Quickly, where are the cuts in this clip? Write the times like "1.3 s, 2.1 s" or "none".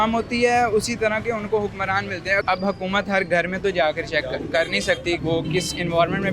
2.4 s, 5.2 s